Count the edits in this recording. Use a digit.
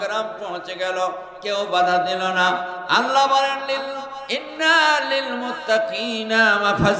0